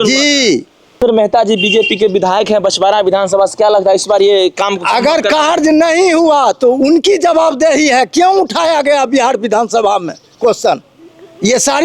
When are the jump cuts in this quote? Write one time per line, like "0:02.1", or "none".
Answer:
0:01.0